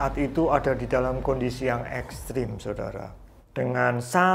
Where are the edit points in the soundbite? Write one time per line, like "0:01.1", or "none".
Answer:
0:03.2